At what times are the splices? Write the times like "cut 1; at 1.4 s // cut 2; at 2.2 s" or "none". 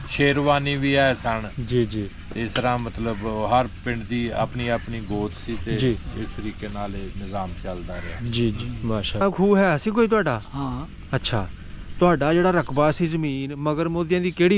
cut 1; at 9.2 s